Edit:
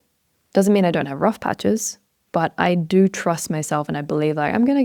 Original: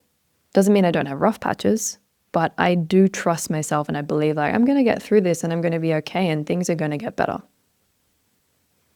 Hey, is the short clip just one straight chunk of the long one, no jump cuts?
yes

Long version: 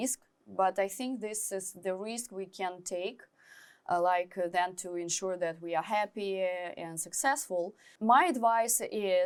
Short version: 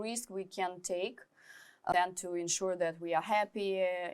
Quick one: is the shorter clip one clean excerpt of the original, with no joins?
no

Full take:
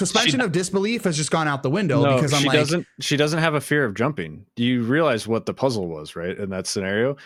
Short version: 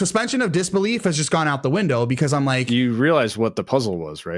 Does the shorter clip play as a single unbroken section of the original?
no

